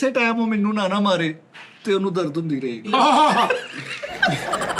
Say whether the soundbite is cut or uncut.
cut